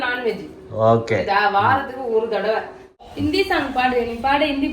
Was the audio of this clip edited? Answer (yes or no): yes